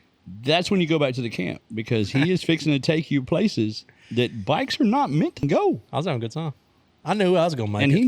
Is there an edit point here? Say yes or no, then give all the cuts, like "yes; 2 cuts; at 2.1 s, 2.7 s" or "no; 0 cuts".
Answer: yes; 1 cut; at 5.4 s